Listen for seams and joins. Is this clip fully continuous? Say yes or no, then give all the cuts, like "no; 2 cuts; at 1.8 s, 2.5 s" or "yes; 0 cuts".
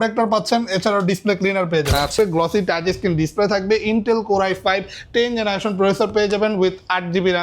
no; 1 cut; at 2.1 s